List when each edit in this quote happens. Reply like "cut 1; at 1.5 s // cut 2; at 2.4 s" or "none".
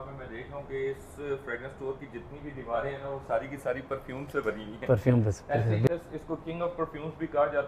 cut 1; at 5.9 s

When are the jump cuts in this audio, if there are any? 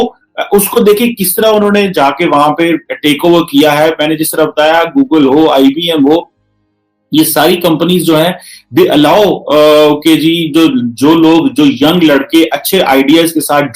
none

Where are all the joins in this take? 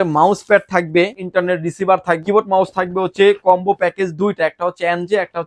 cut 1; at 1.2 s // cut 2; at 2.2 s

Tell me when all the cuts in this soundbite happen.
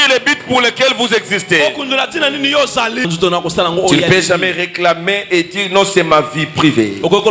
cut 1; at 3.1 s

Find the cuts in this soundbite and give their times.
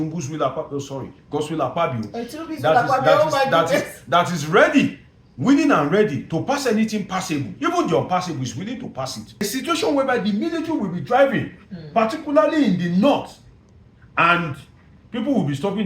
cut 1; at 9.4 s

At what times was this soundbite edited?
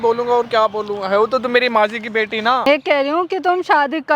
cut 1; at 2.7 s

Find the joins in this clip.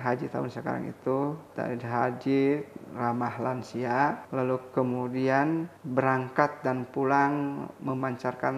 cut 1; at 1.5 s // cut 2; at 4.2 s // cut 3; at 5.8 s

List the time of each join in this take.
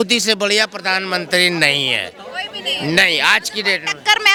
none

